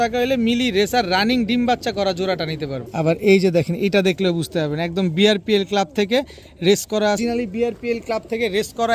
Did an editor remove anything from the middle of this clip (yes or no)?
yes